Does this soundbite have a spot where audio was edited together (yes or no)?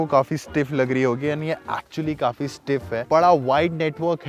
yes